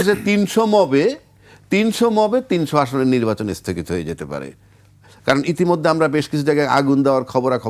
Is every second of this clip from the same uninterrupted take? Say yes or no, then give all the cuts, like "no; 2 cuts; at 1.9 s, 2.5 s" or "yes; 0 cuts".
yes; 0 cuts